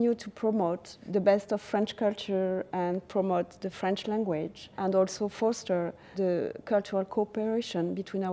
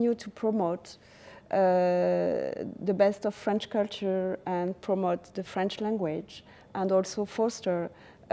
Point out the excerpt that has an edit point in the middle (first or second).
first